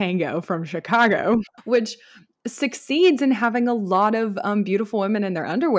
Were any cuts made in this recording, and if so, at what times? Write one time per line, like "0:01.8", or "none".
0:01.6